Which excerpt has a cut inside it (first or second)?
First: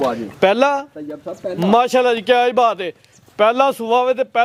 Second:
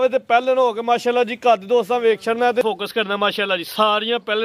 second